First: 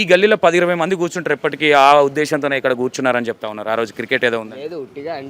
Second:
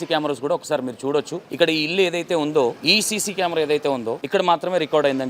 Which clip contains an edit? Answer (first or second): second